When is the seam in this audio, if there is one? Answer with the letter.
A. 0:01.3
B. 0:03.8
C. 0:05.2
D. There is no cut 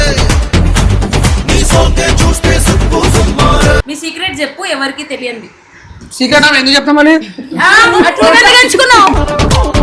B